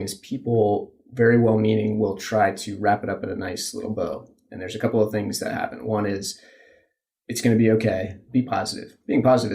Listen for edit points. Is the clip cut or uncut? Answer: cut